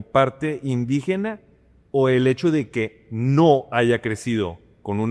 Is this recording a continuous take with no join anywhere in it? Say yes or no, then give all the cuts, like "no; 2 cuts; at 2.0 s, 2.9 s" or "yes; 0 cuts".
yes; 0 cuts